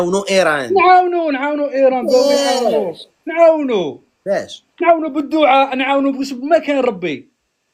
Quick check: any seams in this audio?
no; 0 cuts

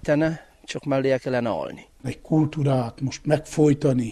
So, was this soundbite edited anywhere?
yes; 1 cut; at 2.1 s

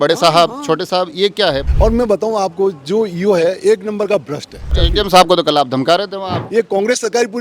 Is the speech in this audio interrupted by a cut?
yes; 3 cuts; at 1.7 s, 4.8 s, 6.4 s

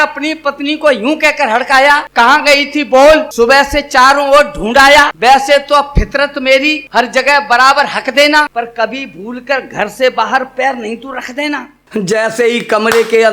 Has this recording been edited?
yes; 6 cuts; at 2.1 s, 3.3 s, 5.1 s, 6.8 s, 8.5 s, 11.9 s

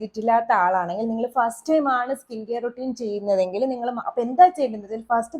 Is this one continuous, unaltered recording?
no; 1 cut; at 4.0 s

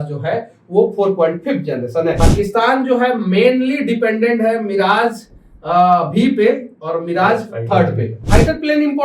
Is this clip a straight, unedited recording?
no; 2 cuts; at 2.3 s, 8.2 s

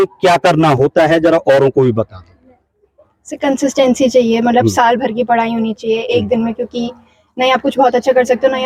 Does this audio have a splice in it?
no; 0 cuts

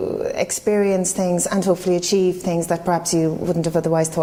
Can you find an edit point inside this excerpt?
no; 0 cuts

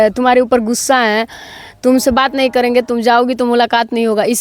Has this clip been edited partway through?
no; 0 cuts

